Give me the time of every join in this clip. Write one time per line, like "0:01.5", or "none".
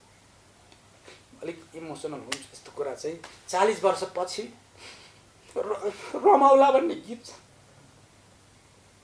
none